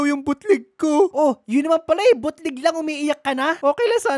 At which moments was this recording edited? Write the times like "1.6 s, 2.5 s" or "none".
none

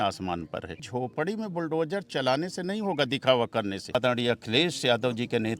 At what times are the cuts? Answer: 0.9 s, 3.9 s

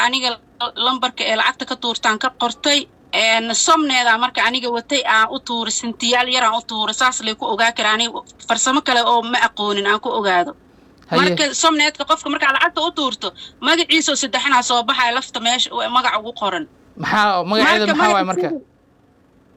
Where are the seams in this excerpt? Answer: none

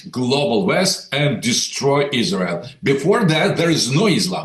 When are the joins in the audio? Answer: none

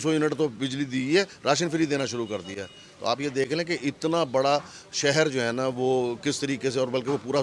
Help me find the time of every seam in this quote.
none

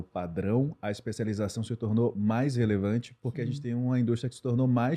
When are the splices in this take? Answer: none

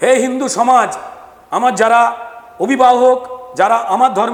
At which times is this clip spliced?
none

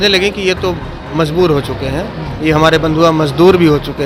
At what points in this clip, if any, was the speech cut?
none

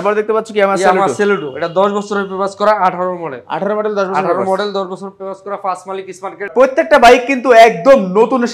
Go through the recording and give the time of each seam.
6.5 s

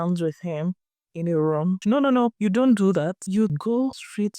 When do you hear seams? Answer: 2.0 s, 3.6 s

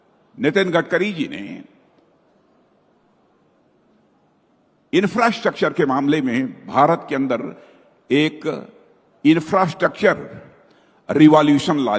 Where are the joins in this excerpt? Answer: none

